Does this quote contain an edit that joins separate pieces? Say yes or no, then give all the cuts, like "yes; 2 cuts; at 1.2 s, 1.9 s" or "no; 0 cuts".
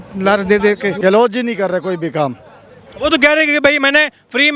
yes; 1 cut; at 1.0 s